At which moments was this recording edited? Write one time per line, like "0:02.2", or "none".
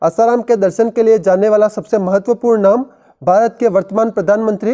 none